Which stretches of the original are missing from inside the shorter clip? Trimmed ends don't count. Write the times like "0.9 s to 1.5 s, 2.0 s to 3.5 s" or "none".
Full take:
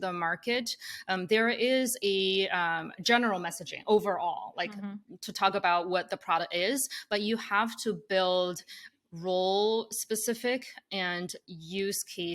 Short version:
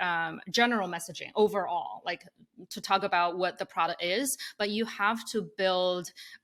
none